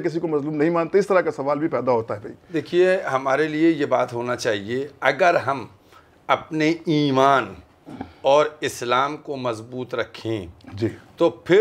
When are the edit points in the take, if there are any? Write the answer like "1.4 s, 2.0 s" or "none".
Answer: none